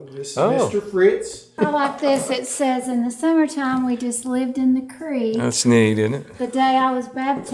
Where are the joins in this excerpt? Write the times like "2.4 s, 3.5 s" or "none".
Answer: 1.5 s